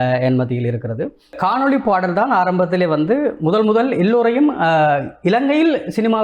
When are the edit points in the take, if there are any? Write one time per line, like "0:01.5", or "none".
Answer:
0:01.3